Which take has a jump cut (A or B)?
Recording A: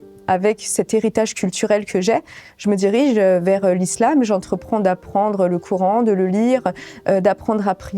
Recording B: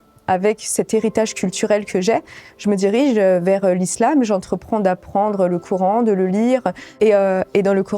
B